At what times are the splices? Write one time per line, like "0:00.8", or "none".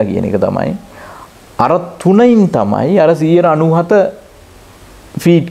none

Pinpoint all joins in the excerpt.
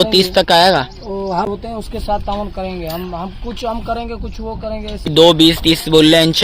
0:01.5
0:05.1

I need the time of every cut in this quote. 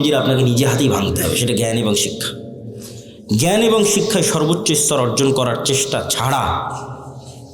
none

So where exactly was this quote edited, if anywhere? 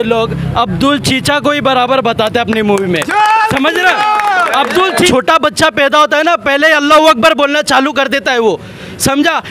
0:05.1

